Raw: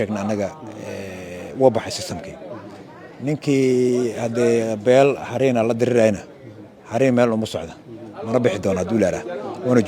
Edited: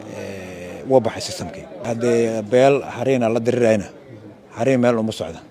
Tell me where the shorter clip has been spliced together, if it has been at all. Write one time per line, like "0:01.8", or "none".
0:01.9